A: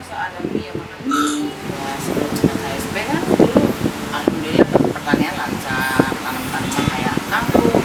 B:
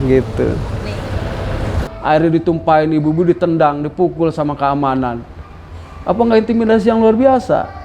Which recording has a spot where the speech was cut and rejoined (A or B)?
B